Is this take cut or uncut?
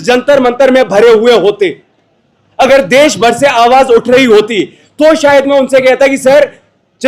uncut